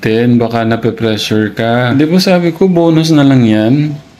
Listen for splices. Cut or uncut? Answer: cut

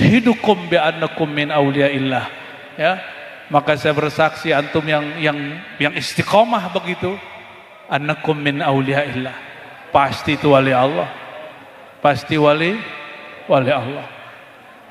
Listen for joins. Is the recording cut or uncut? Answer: uncut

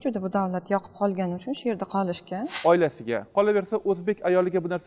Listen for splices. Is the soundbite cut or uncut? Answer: cut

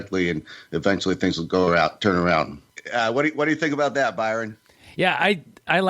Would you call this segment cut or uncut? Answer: cut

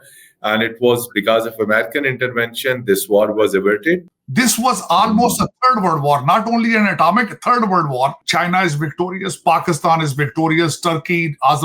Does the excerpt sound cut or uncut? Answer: cut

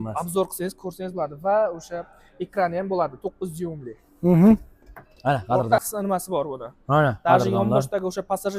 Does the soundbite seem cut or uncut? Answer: cut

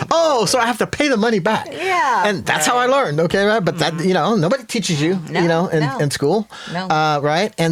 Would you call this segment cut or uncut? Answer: uncut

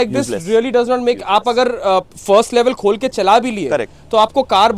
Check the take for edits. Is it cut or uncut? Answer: uncut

